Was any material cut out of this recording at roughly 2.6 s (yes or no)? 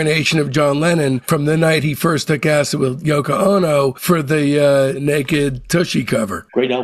no